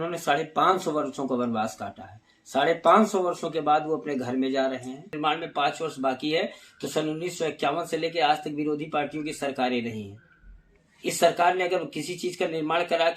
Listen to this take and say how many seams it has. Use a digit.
1